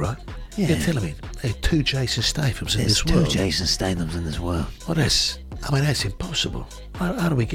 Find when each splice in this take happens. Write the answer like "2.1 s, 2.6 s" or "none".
none